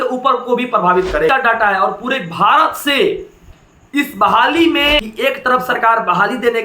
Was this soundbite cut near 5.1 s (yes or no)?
yes